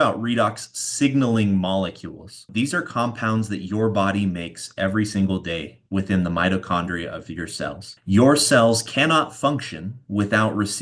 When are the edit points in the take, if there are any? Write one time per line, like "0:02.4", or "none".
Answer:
0:02.5